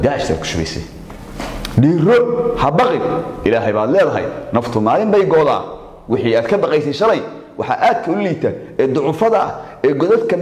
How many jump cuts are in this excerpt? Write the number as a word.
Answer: zero